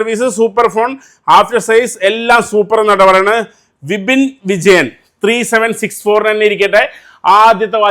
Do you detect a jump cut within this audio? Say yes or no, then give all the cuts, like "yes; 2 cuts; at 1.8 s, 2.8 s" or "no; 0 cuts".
no; 0 cuts